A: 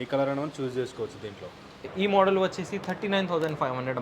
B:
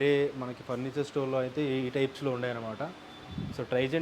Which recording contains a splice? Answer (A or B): A